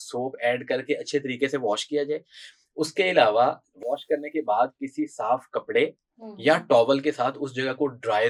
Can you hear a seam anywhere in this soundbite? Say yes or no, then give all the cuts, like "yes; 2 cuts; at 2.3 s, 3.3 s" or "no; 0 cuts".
no; 0 cuts